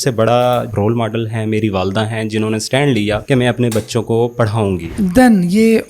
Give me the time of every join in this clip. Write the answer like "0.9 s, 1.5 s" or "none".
4.9 s